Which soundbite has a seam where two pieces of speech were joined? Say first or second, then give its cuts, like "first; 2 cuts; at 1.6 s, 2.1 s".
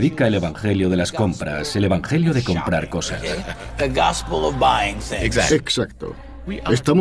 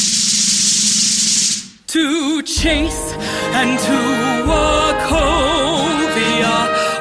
first; 1 cut; at 4.8 s